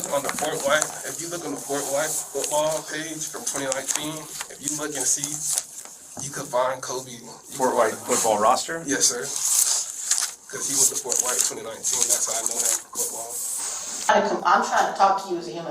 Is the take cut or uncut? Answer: cut